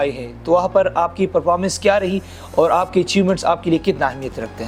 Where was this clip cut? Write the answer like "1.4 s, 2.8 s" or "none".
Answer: none

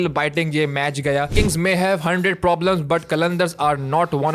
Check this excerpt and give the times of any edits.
1.3 s

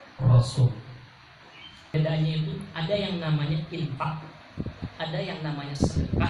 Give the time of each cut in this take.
1.9 s

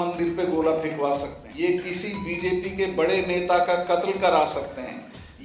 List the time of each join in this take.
1.4 s

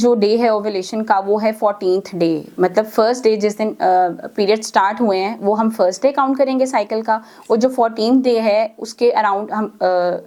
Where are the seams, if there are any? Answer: none

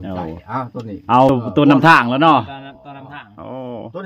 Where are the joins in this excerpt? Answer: 1.4 s

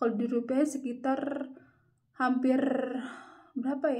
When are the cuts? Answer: none

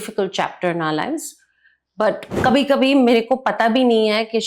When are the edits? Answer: 2.3 s

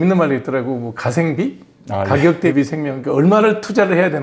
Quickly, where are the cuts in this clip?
none

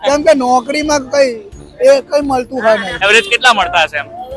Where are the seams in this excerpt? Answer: 2.9 s

